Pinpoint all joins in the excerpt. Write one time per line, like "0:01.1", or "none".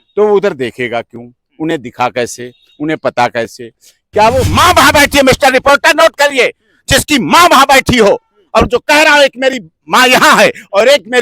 0:04.5

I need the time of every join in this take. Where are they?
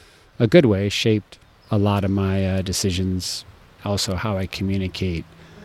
none

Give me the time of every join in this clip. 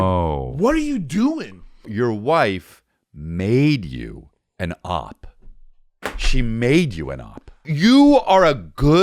0:01.9
0:07.7

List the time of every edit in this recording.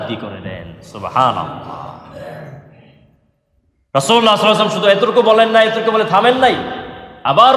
none

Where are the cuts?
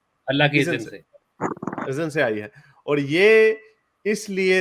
none

